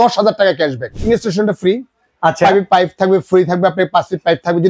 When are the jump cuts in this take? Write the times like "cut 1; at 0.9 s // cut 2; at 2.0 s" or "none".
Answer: cut 1; at 1.0 s